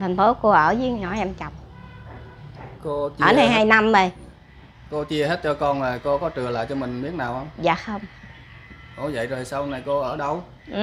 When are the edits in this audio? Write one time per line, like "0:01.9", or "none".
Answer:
none